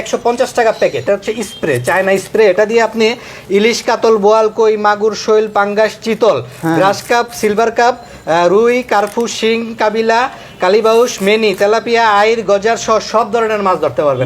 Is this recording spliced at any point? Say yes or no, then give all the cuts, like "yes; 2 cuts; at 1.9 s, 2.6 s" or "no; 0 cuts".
yes; 1 cut; at 1.0 s